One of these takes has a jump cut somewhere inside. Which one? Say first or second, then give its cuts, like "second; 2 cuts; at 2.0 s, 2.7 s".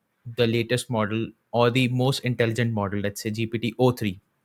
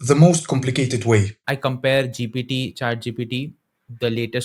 second; 1 cut; at 1.4 s